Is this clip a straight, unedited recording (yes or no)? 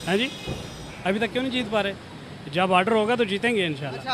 yes